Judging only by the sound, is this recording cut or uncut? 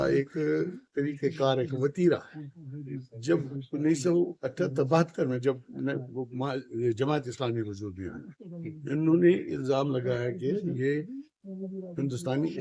uncut